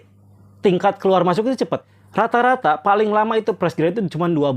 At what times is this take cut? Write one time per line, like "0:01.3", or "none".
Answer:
0:02.0